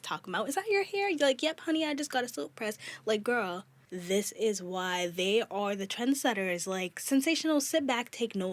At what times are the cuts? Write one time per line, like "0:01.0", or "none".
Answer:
0:03.7